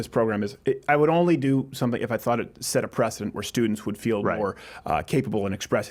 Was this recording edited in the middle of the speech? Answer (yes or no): no